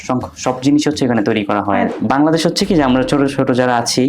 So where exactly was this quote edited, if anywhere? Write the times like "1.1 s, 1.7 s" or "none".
2.0 s